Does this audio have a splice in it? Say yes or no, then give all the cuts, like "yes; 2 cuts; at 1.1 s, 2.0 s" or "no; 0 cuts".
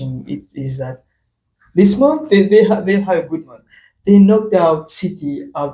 no; 0 cuts